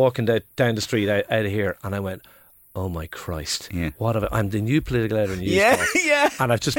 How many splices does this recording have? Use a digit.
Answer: 0